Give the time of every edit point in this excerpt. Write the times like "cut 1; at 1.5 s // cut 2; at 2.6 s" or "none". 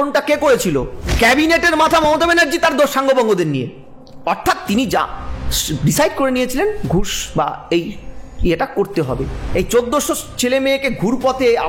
cut 1; at 1.0 s // cut 2; at 9.4 s